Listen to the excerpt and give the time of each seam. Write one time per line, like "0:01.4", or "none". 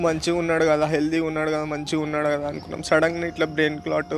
none